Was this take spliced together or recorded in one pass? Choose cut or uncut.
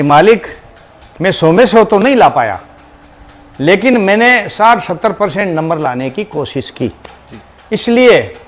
uncut